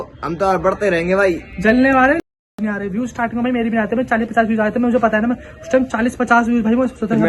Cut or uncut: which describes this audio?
uncut